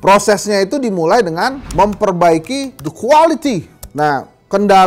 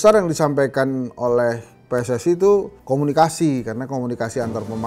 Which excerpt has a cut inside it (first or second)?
first